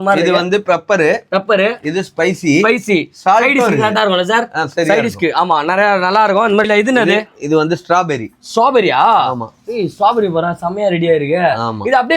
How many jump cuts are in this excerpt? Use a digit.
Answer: 1